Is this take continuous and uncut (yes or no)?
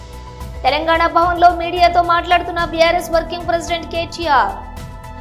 yes